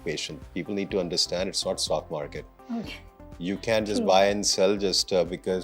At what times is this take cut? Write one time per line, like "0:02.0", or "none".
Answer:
none